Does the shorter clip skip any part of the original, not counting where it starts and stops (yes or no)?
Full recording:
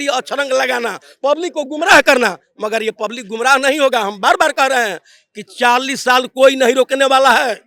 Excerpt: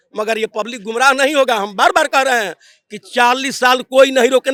no